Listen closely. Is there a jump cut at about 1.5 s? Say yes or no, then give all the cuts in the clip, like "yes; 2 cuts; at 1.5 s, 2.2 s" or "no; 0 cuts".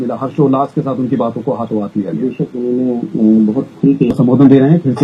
no; 1 cut; at 4.1 s